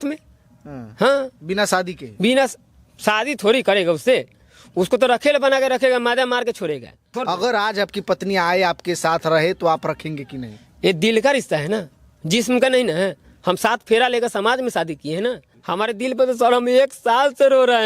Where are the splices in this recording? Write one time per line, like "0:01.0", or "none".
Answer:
0:07.1
0:15.5